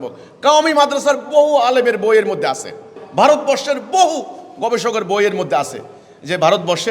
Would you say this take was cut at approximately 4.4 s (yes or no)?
no